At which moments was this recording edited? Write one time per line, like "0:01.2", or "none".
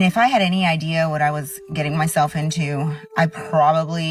none